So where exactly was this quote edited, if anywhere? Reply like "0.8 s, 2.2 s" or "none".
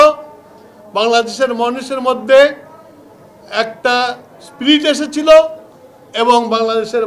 none